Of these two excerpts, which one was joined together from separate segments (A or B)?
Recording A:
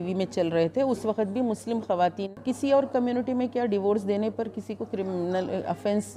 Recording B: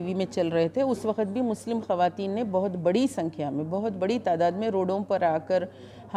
A